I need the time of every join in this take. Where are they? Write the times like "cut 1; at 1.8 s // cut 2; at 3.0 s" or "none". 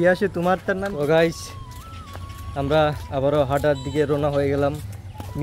cut 1; at 0.9 s